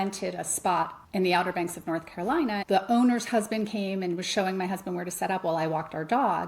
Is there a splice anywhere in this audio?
yes; 2 cuts; at 1.0 s, 2.6 s

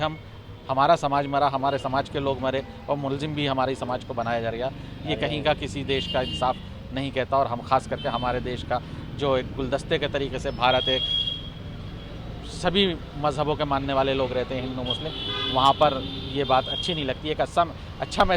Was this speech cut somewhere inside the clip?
no; 0 cuts

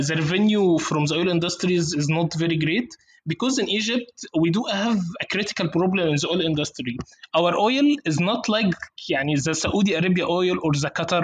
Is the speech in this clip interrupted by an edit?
no; 0 cuts

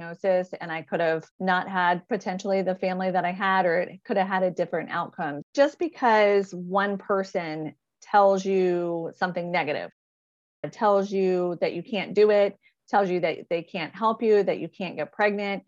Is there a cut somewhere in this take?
yes; 2 cuts; at 1.3 s, 5.4 s

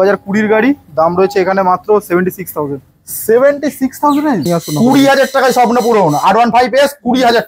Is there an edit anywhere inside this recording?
yes; 1 cut; at 4.5 s

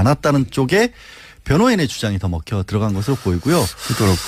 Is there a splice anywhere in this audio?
no; 0 cuts

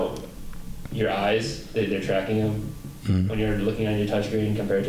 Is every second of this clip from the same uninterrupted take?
yes; 0 cuts

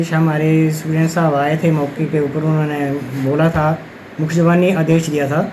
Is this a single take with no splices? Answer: yes; 0 cuts

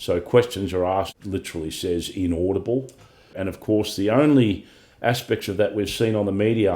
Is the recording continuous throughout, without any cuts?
no; 2 cuts; at 1.1 s, 3.4 s

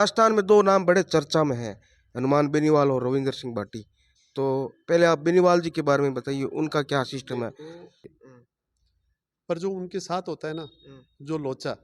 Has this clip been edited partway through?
yes; 1 cut; at 8.2 s

